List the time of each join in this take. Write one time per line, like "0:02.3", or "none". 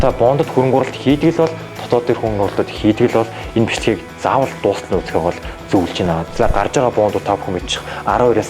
0:06.3